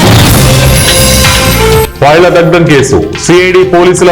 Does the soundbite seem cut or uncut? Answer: cut